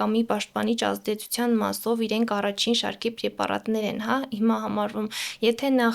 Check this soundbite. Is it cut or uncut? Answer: uncut